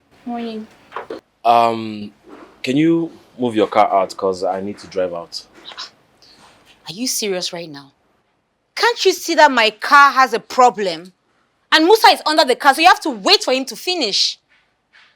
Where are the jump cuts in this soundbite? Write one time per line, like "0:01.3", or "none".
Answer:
0:01.2